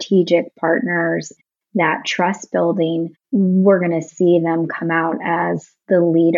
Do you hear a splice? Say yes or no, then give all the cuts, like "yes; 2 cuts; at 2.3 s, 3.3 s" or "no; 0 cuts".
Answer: yes; 1 cut; at 1.4 s